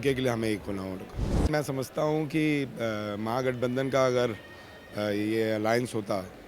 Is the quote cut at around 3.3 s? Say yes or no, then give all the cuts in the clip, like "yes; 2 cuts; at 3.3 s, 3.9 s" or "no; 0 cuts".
no; 1 cut; at 1.5 s